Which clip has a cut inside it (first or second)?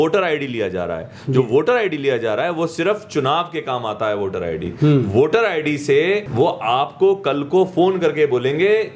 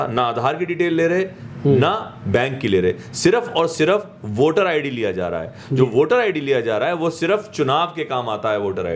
first